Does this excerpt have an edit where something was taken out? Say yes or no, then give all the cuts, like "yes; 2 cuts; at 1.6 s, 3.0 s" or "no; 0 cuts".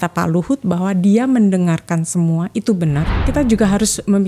yes; 1 cut; at 3.3 s